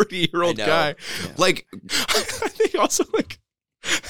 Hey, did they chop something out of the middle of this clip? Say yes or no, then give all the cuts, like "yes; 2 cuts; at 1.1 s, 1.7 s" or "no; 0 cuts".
yes; 1 cut; at 1.8 s